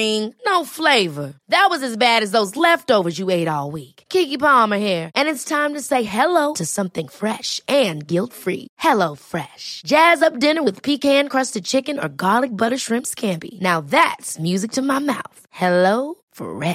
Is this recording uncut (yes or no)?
yes